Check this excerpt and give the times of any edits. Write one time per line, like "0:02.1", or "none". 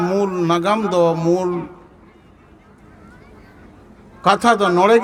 none